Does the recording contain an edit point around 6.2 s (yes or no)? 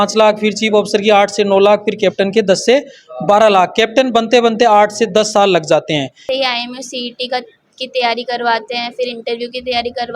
yes